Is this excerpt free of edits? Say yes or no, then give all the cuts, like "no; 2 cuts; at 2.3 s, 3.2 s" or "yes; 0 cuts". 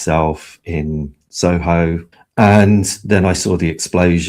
no; 1 cut; at 2.2 s